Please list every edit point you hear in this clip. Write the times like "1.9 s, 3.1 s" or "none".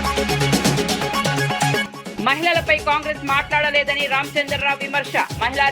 1.8 s